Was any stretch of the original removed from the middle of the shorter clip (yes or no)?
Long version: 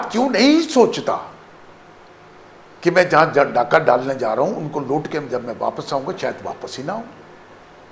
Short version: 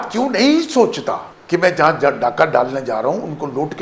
yes